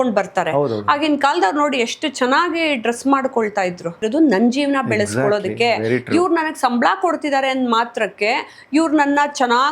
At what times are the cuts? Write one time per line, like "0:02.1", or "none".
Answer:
0:04.0